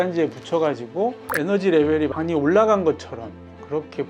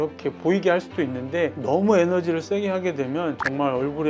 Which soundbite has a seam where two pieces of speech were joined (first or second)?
second